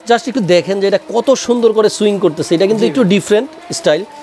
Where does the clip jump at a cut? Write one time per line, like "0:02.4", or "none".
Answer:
none